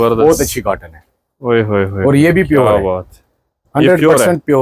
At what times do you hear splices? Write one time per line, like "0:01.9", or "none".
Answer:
none